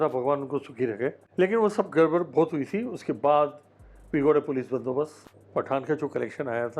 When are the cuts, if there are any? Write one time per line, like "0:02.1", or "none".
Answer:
0:01.2
0:05.2